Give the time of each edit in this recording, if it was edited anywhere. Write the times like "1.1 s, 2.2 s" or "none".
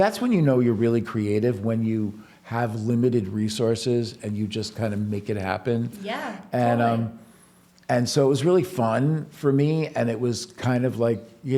none